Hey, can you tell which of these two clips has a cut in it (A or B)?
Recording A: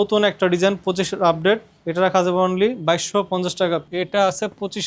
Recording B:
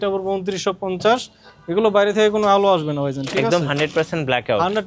A